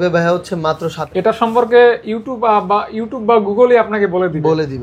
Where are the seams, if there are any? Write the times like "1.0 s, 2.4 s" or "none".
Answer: 1.0 s

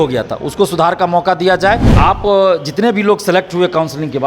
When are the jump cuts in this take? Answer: 1.9 s

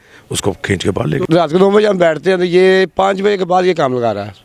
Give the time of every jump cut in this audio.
1.2 s

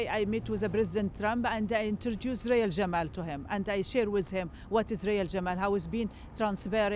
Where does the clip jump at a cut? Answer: none

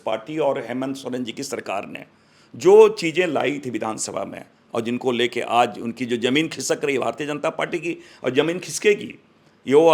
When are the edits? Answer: none

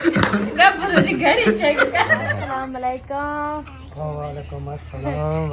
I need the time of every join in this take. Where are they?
2.3 s

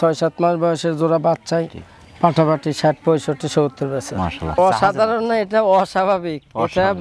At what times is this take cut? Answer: 4.4 s

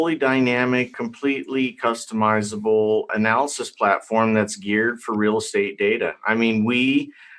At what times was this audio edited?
0.9 s, 3.1 s

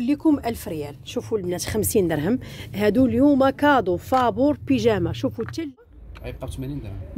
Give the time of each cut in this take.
6.0 s

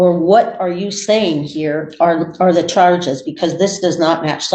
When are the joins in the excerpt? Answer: none

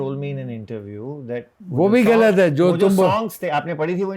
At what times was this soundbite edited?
1.6 s

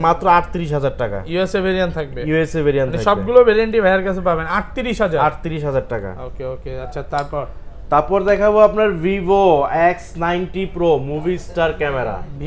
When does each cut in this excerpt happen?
none

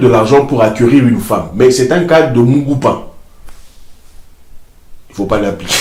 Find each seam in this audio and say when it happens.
none

